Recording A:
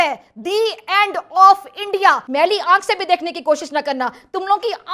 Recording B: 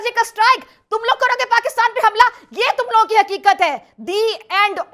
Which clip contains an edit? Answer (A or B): A